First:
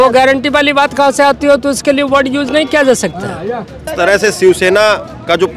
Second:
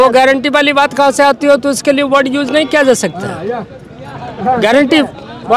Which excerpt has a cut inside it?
first; 1 cut; at 3.9 s

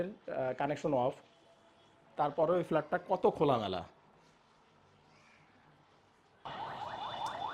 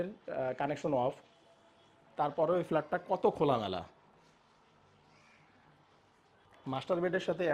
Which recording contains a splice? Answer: first; 1 cut; at 6.5 s

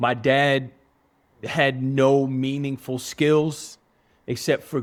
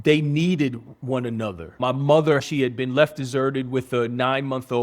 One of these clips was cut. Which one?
second; 2 cuts; at 1.8 s, 2.4 s

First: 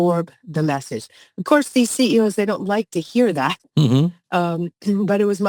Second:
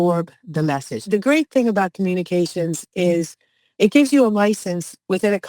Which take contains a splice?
second; 1 cut; at 1.1 s

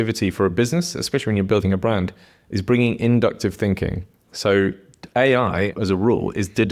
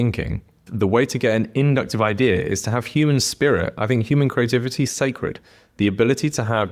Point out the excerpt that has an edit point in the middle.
first; 1 cut; at 5.7 s

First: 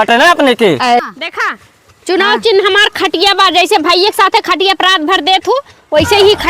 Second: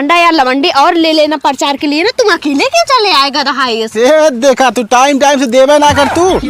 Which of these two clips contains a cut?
first; 1 cut; at 1.0 s

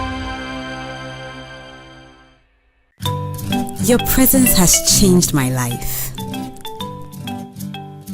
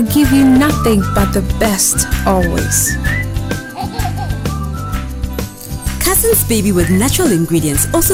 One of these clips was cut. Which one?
first; 1 cut; at 1.1 s

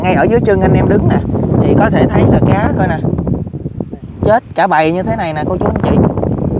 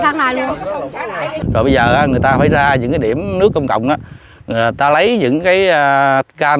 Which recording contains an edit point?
second; 1 cut; at 1.4 s

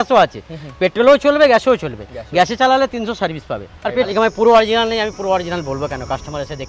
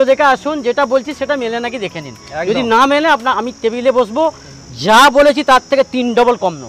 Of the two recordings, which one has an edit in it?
first; 1 cut; at 4.1 s

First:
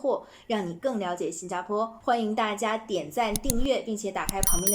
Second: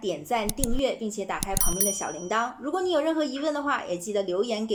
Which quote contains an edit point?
first; 1 cut; at 2.0 s

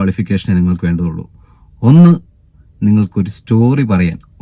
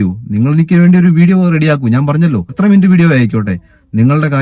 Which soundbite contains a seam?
second; 1 cut; at 2.5 s

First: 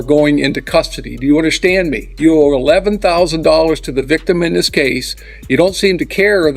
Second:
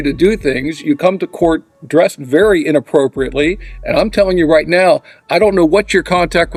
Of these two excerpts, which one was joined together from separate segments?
first; 1 cut; at 2.1 s

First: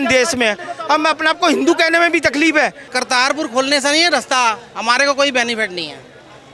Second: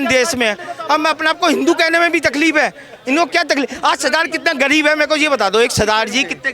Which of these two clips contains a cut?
first; 1 cut; at 2.9 s

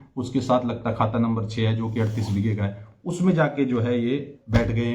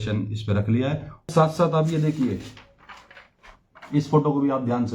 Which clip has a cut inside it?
second; 1 cut; at 1.3 s

